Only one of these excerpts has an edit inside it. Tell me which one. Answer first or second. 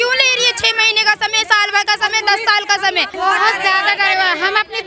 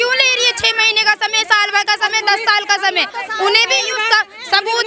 first